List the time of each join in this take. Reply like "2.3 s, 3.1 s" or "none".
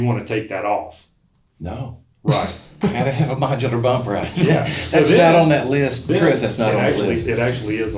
6.1 s